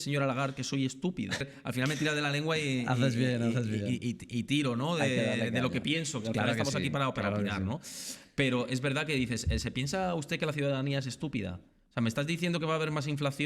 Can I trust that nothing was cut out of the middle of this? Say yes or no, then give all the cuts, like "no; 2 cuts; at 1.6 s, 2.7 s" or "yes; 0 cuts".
no; 1 cut; at 1.6 s